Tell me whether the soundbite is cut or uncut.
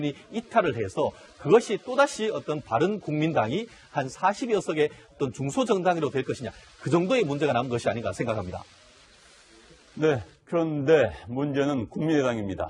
uncut